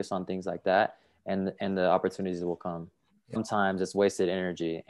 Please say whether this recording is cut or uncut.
cut